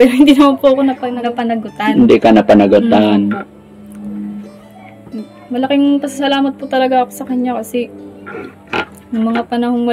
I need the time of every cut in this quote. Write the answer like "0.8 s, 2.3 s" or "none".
none